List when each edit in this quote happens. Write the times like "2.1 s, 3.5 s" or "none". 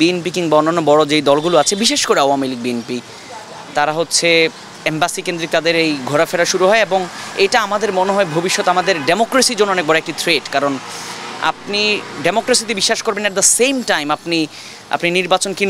none